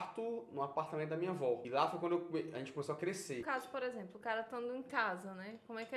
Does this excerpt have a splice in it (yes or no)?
yes